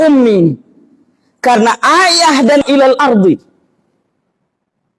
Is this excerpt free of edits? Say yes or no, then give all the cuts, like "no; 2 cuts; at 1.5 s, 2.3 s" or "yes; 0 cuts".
no; 1 cut; at 2.6 s